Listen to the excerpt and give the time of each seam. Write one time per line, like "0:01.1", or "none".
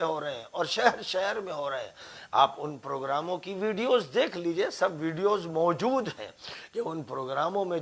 none